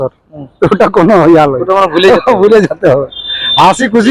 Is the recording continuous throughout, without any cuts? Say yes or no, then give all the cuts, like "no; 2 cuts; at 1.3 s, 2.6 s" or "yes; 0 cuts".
yes; 0 cuts